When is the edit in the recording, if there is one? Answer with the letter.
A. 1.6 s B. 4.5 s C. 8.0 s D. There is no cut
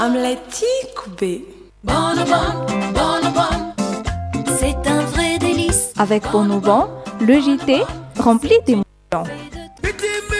A